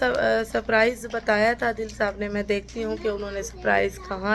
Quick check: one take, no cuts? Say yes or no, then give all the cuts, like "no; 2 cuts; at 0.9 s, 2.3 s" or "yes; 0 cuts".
yes; 0 cuts